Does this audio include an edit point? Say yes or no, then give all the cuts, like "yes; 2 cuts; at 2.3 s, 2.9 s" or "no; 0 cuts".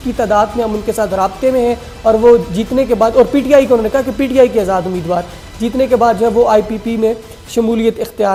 no; 0 cuts